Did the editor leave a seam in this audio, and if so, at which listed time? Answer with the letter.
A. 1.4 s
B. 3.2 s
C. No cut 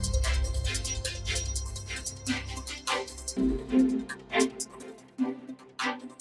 B